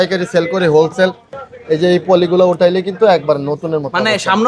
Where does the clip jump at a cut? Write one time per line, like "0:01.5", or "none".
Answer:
0:01.5